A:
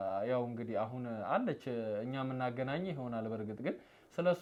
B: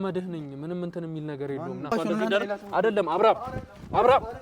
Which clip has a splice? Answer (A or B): B